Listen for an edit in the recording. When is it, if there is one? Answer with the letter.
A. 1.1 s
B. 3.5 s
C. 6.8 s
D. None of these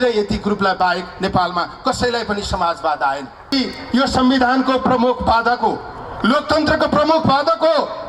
B